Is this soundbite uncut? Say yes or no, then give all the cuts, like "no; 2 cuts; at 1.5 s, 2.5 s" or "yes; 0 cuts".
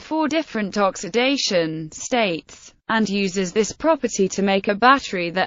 yes; 0 cuts